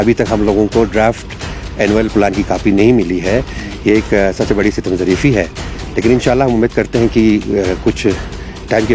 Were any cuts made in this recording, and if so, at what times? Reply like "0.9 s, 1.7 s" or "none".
none